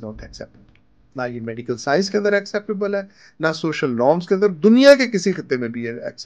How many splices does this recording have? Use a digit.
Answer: 0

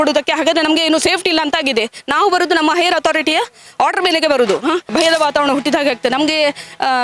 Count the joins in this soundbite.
1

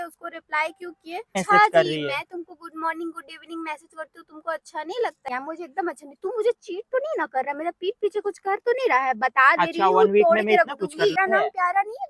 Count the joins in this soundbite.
3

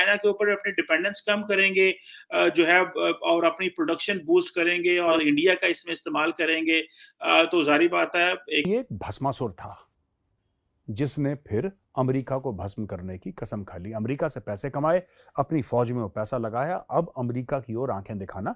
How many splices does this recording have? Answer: 2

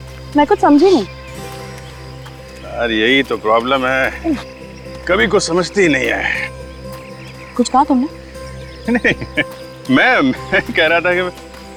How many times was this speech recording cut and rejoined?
0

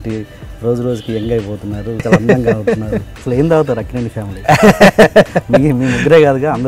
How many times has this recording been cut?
2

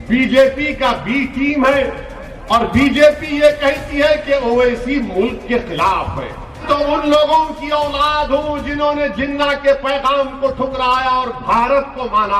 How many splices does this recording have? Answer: 1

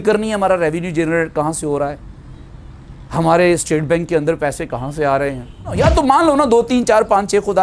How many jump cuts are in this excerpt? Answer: 1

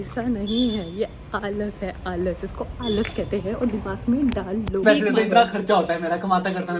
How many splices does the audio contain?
1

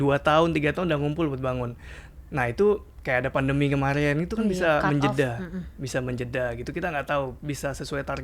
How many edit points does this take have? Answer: 0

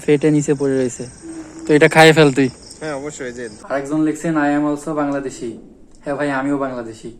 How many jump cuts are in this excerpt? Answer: 1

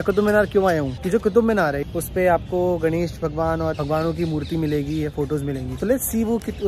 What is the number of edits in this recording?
4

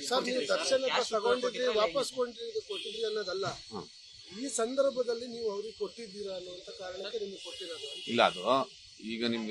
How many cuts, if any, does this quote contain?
1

